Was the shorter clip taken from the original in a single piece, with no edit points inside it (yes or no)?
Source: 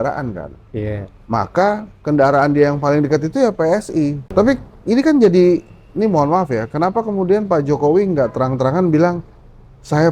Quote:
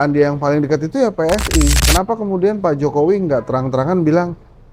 no